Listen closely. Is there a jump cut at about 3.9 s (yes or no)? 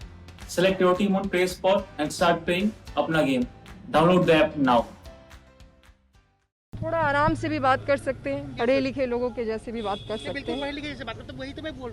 no